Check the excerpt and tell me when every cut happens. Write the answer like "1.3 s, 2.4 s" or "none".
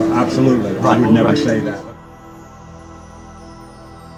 none

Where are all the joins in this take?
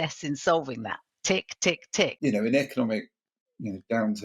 2.2 s

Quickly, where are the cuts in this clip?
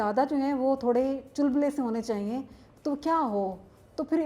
none

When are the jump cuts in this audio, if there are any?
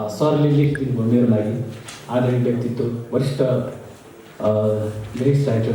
none

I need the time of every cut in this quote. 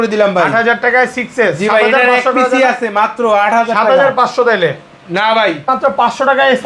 5.7 s

